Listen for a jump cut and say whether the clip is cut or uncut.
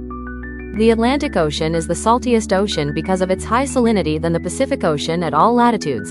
uncut